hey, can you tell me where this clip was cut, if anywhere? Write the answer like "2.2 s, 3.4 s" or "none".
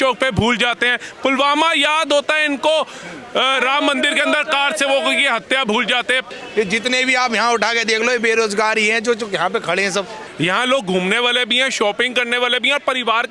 6.2 s, 10.2 s